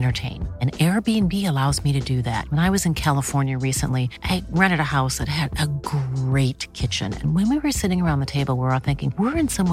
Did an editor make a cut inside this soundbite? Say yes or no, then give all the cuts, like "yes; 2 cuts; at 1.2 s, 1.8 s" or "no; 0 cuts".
no; 0 cuts